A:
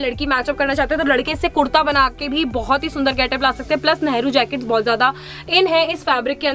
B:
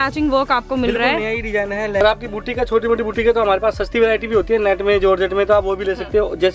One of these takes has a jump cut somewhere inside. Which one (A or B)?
B